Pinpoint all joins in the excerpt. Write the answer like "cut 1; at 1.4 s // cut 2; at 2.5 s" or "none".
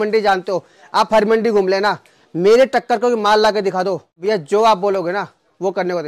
cut 1; at 4.1 s